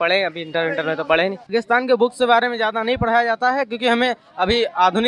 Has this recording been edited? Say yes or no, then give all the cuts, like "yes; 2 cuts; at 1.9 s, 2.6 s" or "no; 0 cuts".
yes; 1 cut; at 1.5 s